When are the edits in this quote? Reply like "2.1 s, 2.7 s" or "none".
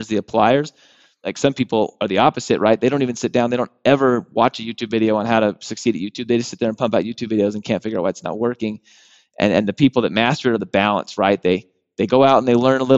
1.3 s